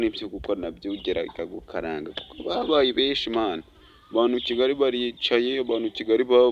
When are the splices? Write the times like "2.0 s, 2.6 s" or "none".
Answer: none

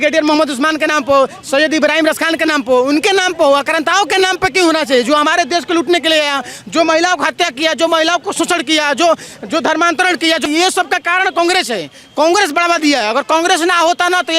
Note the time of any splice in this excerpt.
10.4 s

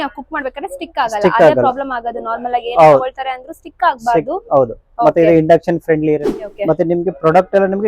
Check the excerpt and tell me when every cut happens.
6.4 s

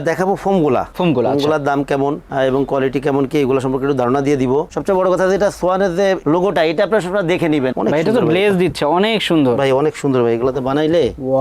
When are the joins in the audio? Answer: 4.7 s, 7.7 s

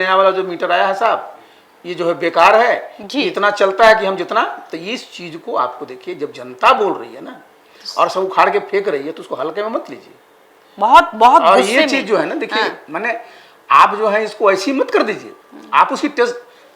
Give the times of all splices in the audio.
none

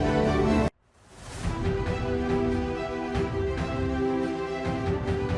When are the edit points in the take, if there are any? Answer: none

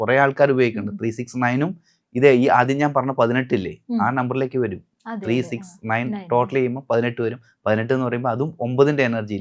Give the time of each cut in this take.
none

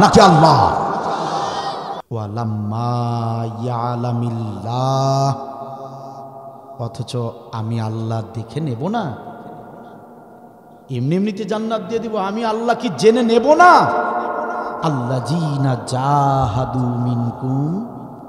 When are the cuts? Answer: 2.1 s

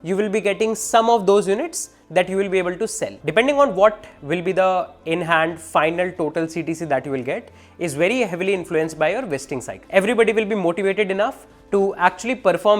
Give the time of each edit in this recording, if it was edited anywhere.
3.2 s, 9.7 s

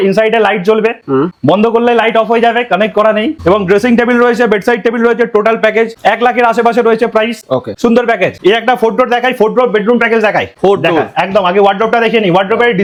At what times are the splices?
none

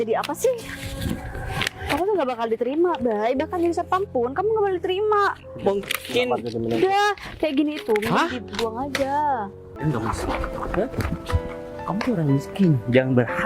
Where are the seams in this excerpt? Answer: 9.7 s

